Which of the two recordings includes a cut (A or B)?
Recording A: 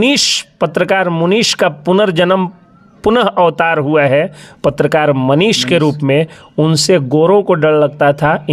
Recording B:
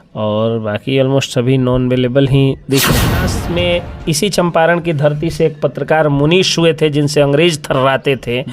B